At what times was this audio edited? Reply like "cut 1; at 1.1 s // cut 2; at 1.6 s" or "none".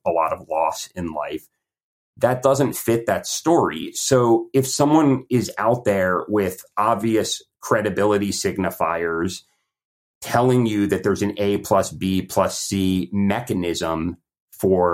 none